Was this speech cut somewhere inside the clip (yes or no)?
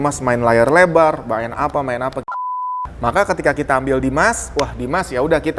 yes